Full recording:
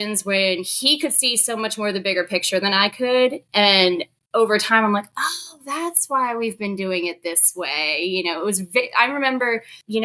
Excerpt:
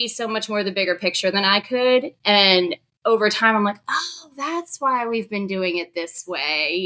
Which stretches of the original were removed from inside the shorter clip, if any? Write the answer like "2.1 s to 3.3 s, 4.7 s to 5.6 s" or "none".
none